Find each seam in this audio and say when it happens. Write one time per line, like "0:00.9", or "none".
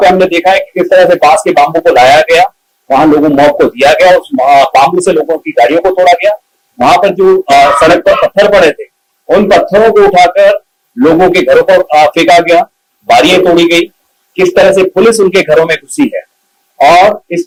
none